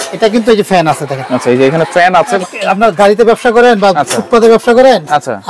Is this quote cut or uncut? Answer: cut